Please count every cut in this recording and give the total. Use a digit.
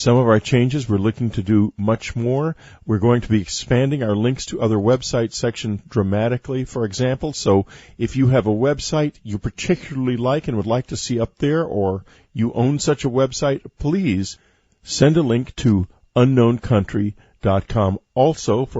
1